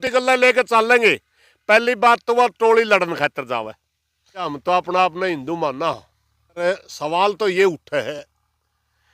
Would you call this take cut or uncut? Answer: cut